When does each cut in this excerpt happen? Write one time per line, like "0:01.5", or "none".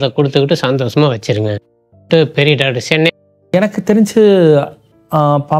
0:03.1